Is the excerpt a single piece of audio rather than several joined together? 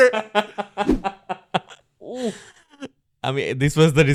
yes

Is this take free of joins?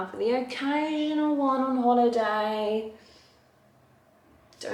yes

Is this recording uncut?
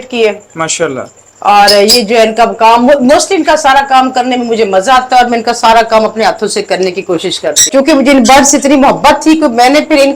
no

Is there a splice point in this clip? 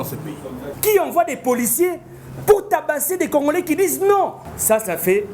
yes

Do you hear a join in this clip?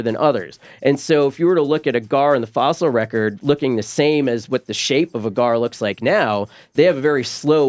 no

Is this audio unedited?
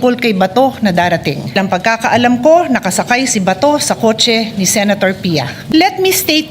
no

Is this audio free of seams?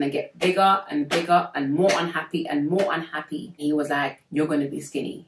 no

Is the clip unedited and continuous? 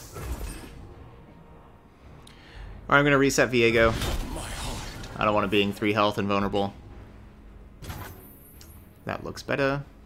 yes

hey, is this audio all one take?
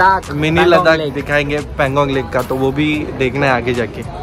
yes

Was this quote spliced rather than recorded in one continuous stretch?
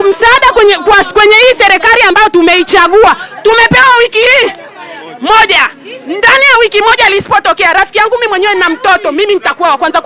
no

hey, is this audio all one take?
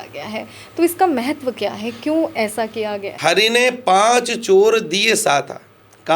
no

